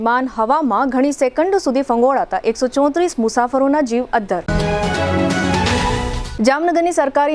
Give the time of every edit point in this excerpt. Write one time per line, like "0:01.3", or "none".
none